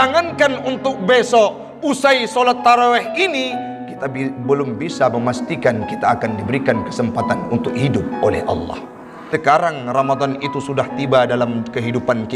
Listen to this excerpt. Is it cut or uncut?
cut